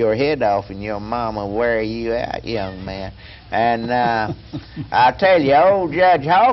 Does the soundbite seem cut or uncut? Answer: uncut